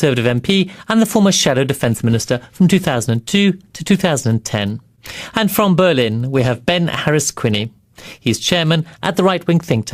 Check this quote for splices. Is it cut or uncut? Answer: cut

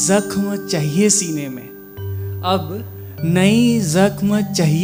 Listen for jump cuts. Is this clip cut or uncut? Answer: uncut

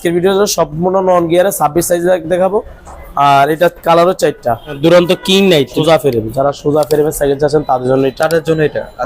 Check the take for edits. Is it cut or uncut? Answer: cut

